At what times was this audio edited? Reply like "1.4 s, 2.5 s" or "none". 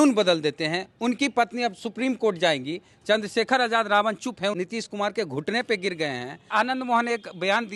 4.5 s, 6.5 s

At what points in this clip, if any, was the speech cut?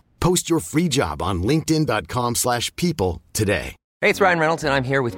3.8 s

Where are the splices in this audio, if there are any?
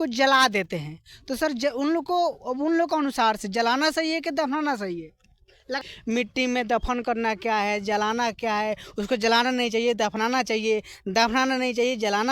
5.8 s

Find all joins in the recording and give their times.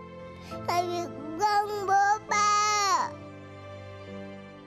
none

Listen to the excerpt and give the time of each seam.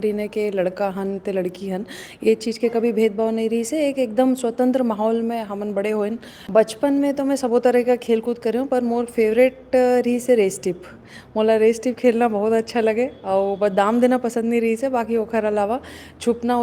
6.3 s

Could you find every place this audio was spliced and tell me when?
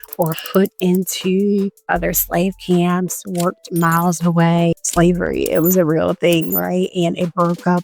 4.7 s

